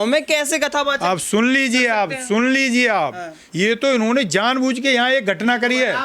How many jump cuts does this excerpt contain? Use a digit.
1